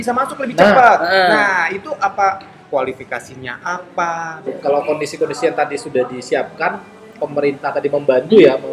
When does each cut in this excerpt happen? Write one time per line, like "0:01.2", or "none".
0:04.5